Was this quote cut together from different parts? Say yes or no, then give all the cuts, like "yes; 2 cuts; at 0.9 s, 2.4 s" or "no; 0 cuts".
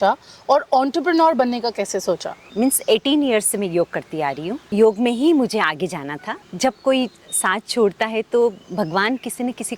yes; 3 cuts; at 2.4 s, 4.5 s, 6.4 s